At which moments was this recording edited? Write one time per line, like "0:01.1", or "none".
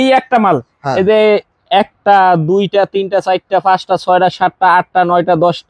none